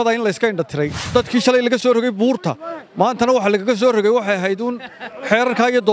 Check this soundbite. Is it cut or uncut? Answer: cut